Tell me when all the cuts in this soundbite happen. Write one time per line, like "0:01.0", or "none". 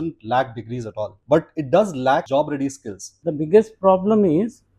0:01.2
0:02.3
0:03.1